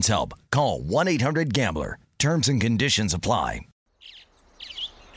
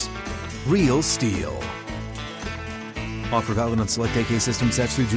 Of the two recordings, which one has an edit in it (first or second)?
first